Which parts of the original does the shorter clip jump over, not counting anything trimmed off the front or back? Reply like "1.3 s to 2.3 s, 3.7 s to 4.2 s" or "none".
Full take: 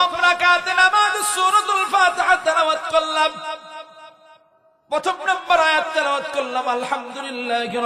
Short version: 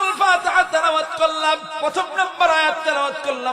3.4 s to 4.8 s